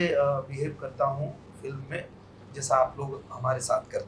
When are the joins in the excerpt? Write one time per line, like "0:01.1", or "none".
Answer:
none